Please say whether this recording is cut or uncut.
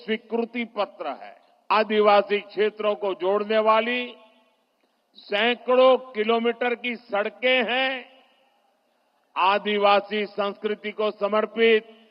cut